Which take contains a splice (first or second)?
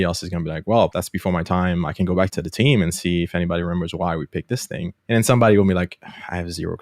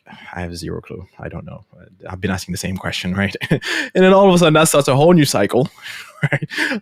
first